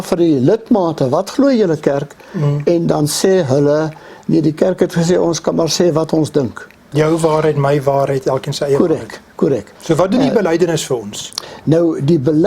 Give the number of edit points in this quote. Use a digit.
2